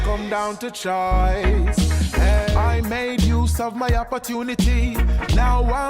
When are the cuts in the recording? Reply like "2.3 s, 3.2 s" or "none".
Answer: 2.1 s